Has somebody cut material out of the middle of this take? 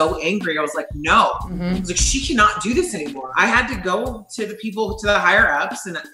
no; 0 cuts

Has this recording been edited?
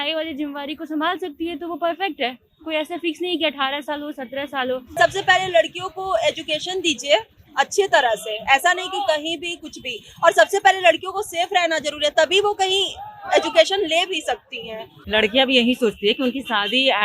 yes; 2 cuts; at 4.9 s, 14.9 s

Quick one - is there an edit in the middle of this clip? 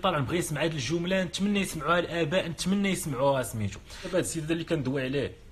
yes; 1 cut; at 4.1 s

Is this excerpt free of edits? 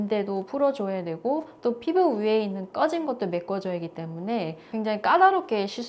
no; 1 cut; at 4.7 s

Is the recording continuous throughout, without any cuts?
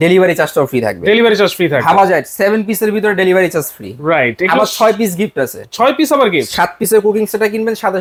yes; 0 cuts

